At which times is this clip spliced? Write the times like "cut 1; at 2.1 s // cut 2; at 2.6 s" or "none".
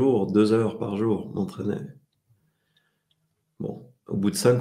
none